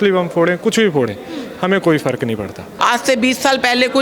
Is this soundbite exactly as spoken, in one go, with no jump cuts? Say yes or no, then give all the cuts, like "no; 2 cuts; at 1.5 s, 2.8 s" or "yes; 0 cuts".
no; 1 cut; at 2.7 s